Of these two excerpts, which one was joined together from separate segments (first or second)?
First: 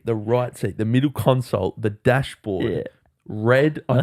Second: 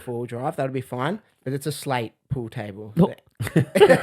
second